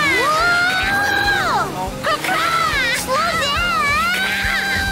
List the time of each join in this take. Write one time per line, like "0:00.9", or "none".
0:01.8